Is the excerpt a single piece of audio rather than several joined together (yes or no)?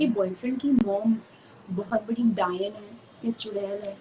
yes